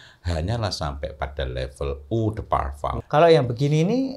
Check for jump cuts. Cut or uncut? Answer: cut